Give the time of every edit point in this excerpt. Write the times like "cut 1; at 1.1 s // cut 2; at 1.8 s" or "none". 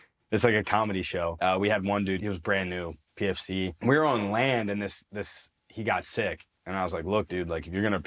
cut 1; at 1.3 s // cut 2; at 2.2 s // cut 3; at 3.7 s // cut 4; at 6.5 s